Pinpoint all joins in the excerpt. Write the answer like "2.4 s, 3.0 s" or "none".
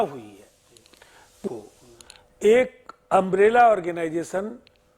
1.4 s